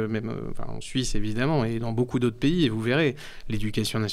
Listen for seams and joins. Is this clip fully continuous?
yes; 0 cuts

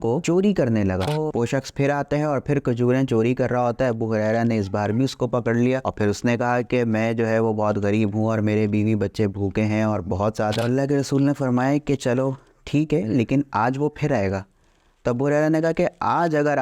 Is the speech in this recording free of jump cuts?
no; 2 cuts; at 1.1 s, 10.6 s

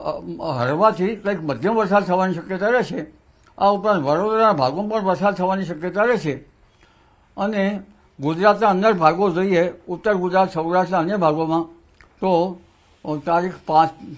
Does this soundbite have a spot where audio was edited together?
yes; 1 cut; at 4.6 s

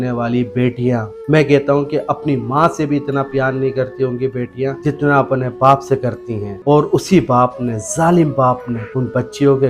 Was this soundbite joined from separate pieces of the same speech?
no; 0 cuts

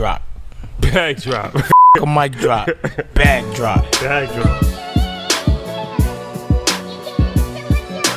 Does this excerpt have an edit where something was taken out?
no; 0 cuts

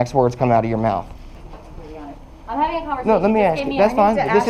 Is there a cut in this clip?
yes; 1 cut; at 1.4 s

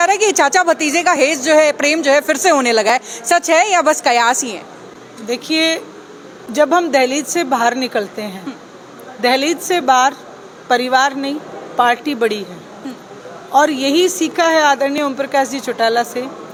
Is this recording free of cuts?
yes; 0 cuts

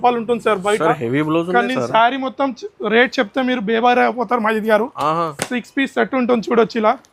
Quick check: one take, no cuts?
yes; 0 cuts

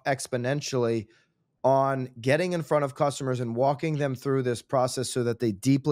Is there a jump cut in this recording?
no; 0 cuts

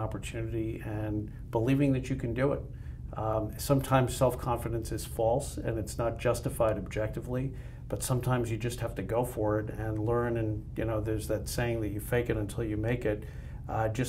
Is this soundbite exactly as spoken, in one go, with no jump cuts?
yes; 0 cuts

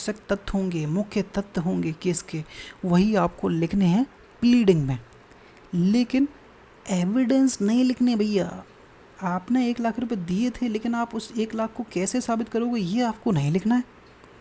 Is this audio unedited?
yes; 0 cuts

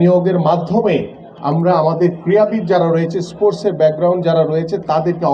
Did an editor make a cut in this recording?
no; 0 cuts

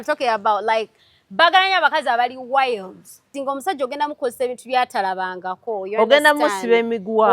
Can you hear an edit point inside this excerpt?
yes; 1 cut; at 3.3 s

